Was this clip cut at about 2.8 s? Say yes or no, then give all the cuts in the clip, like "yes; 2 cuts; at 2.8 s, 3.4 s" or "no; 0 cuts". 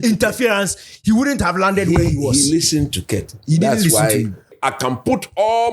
no; 1 cut; at 4.5 s